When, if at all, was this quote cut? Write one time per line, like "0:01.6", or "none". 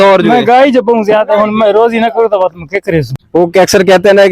0:03.2